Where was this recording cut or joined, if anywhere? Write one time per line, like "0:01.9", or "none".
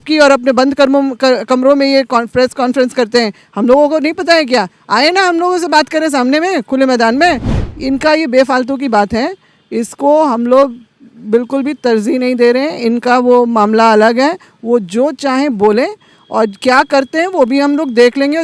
0:07.5